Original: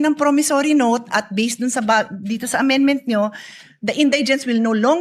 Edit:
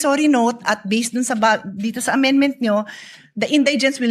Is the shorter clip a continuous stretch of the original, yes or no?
yes